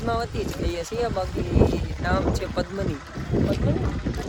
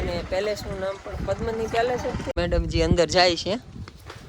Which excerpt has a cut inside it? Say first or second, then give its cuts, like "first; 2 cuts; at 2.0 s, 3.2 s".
second; 1 cut; at 2.3 s